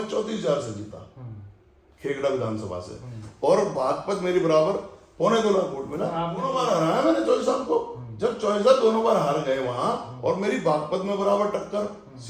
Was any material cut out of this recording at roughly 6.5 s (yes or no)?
yes